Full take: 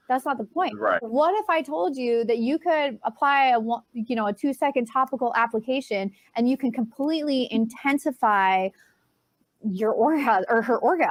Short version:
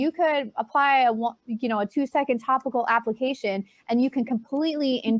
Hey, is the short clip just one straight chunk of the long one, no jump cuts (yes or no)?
yes